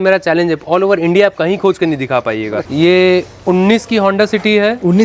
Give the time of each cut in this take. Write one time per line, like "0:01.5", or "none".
0:02.7